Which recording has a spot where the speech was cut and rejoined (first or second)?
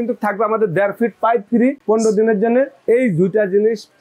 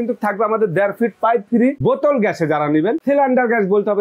first